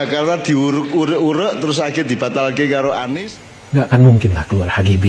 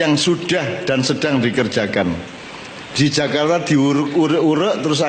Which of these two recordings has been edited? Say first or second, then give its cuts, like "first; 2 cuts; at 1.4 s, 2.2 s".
first; 1 cut; at 3.2 s